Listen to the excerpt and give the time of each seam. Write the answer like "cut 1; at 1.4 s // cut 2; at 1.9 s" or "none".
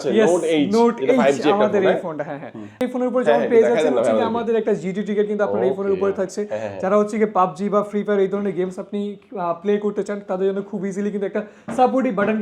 cut 1; at 2.8 s